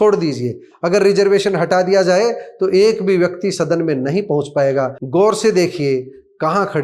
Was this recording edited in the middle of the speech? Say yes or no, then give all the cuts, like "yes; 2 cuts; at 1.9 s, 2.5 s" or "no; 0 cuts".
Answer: yes; 1 cut; at 5.0 s